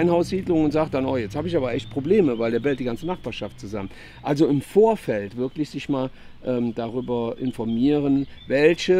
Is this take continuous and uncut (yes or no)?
yes